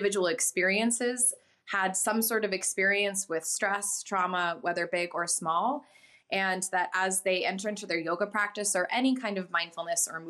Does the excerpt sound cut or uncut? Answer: uncut